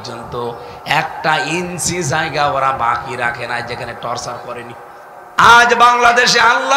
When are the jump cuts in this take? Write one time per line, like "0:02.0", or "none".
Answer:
0:05.1

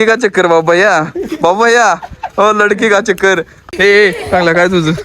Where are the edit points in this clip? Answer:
0:03.5

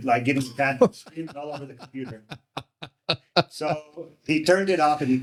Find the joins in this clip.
none

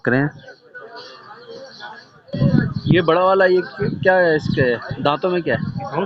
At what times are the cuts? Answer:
none

